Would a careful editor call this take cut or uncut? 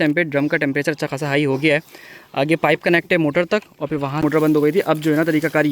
cut